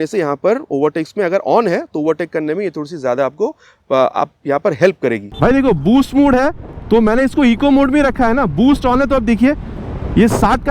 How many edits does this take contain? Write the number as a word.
one